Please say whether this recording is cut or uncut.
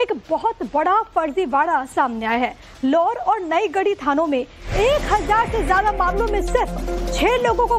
cut